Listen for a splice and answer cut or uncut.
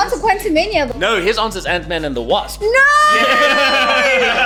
uncut